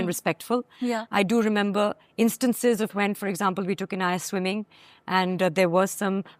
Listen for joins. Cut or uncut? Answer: uncut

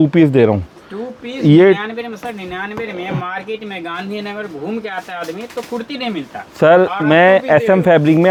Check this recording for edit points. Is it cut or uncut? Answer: uncut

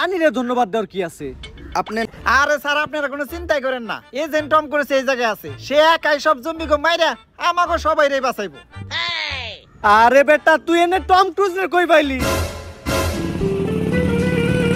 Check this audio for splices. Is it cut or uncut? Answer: cut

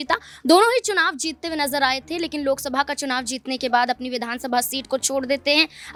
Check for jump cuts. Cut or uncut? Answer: uncut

